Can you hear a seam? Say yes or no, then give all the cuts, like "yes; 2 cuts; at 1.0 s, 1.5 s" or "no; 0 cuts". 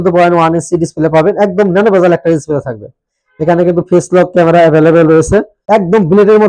yes; 1 cut; at 5.6 s